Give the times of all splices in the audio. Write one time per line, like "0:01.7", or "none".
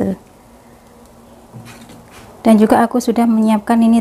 0:02.1

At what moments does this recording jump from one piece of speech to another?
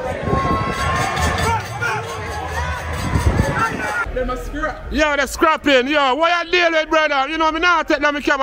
0:04.0

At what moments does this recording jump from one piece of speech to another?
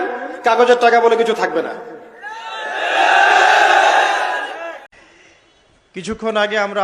0:04.9

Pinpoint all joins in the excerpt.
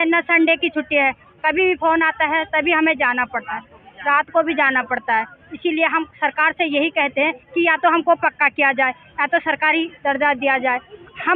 none

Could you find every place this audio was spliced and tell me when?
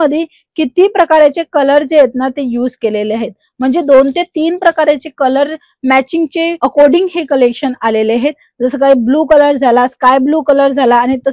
none

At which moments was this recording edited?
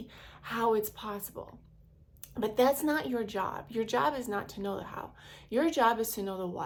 none

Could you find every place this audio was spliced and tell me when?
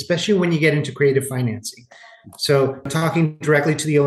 0:02.9

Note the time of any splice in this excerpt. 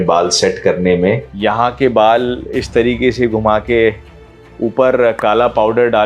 0:01.3

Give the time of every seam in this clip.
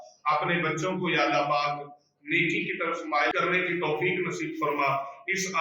0:03.3

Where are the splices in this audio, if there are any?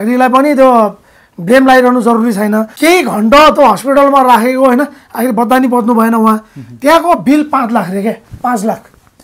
0:02.7

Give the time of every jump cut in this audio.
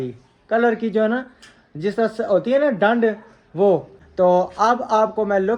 0:04.0

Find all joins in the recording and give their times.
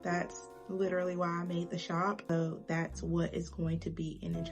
0:02.3

